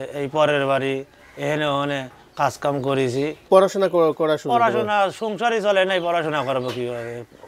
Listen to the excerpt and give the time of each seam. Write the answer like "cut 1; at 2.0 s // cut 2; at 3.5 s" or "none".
cut 1; at 3.4 s